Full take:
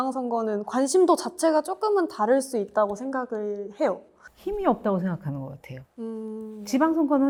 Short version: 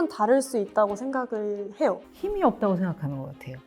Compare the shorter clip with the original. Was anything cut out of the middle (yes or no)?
yes